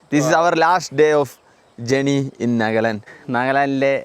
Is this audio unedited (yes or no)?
no